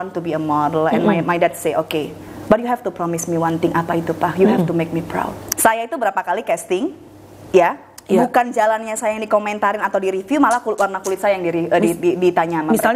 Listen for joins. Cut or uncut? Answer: cut